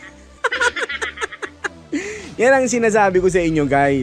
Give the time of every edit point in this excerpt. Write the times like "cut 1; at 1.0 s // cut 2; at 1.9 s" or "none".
none